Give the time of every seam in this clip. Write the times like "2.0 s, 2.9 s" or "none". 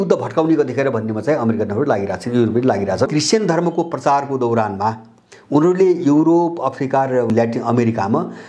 3.1 s, 7.3 s